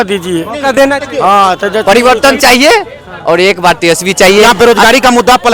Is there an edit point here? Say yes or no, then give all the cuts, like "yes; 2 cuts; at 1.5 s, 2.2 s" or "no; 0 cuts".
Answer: yes; 2 cuts; at 1.8 s, 4.5 s